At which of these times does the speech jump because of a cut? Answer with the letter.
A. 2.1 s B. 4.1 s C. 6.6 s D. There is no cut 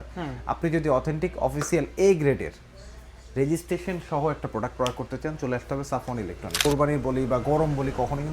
C